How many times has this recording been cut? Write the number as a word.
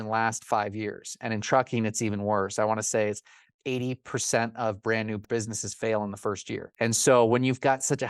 two